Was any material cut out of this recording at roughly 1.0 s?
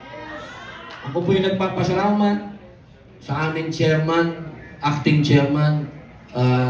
yes; 1 cut; at 1.0 s

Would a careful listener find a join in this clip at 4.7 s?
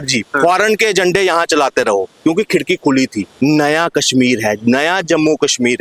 no; 1 cut; at 3.3 s

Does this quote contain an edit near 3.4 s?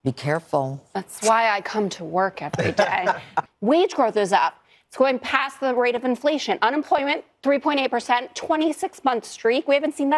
yes; 1 cut; at 3.4 s

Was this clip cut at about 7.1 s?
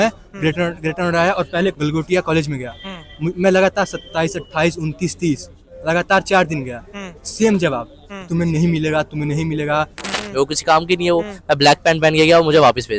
no; 2 cuts; at 1.7 s, 10.1 s

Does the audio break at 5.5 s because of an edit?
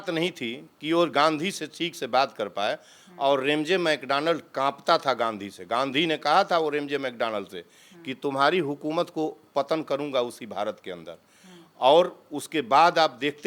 no; 0 cuts

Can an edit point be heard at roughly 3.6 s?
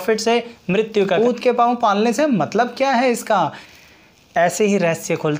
yes; 2 cuts; at 1.2 s, 3.6 s

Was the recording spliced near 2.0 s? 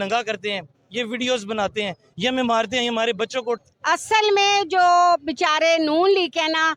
no; 1 cut; at 3.6 s

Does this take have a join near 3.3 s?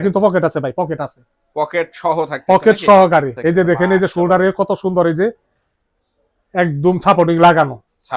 yes; 1 cut; at 3.3 s

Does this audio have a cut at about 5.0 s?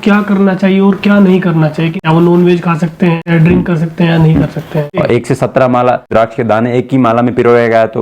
yes; 4 cuts; at 1.9 s, 3.2 s, 5.0 s, 6.1 s

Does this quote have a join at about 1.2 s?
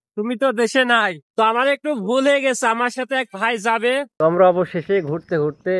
yes; 2 cuts; at 1.2 s, 4.1 s

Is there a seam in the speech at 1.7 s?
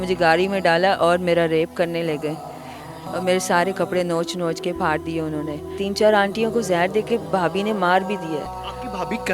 no; 1 cut; at 5.8 s

